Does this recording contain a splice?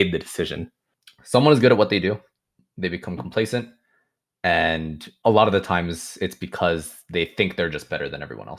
yes; 1 cut; at 1.0 s

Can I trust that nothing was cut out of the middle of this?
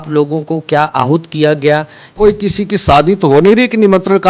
no; 1 cut; at 2.0 s

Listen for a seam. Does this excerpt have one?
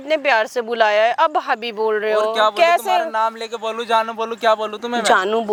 no; 0 cuts

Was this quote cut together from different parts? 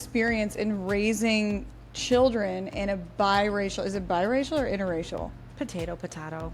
no; 0 cuts

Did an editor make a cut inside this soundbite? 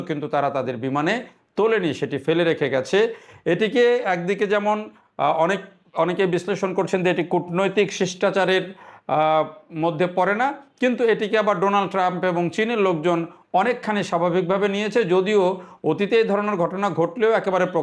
no; 0 cuts

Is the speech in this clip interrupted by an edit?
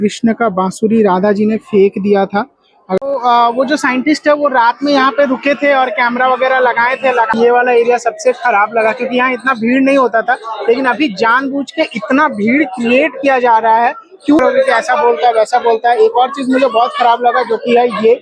yes; 3 cuts; at 3.0 s, 7.3 s, 14.4 s

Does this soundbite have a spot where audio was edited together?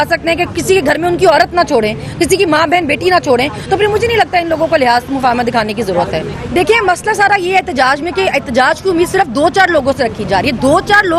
no; 0 cuts

